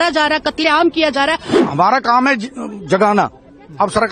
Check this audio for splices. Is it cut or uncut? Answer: cut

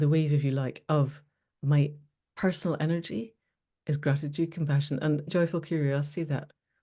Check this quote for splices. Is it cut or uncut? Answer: cut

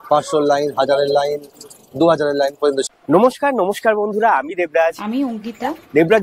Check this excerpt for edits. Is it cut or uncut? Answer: cut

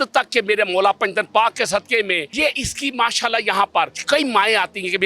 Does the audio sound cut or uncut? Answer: cut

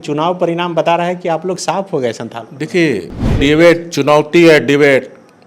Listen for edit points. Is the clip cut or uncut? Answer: cut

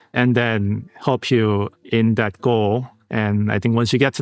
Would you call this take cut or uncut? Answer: cut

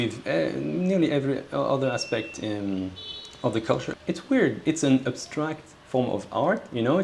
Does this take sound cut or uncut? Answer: uncut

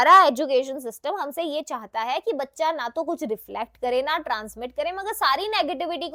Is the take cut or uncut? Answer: uncut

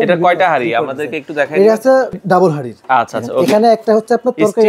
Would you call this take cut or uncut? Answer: cut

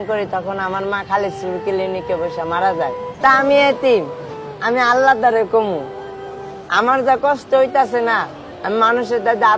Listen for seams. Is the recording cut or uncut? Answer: cut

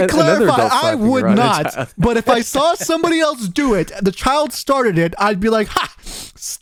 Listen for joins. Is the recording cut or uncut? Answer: uncut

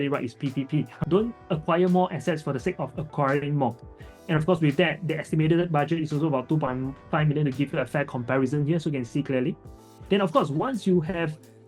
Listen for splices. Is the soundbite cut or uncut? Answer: cut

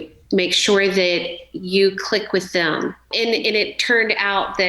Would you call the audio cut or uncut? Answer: cut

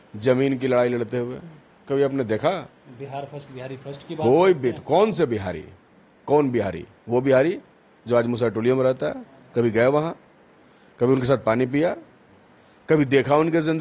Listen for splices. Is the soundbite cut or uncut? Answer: uncut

